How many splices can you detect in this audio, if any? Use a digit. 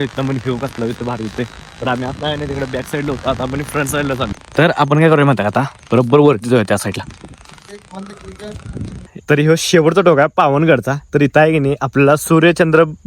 2